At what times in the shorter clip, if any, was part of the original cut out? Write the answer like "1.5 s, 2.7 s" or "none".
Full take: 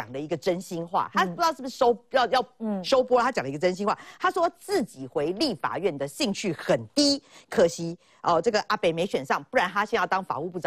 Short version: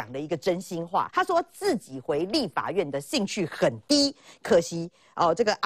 1.1 s